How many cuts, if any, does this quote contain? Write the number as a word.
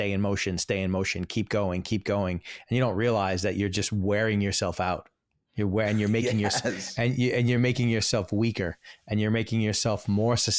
zero